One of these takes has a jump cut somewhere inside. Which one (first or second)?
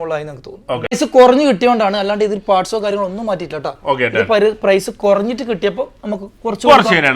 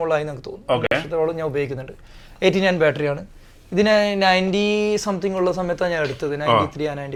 first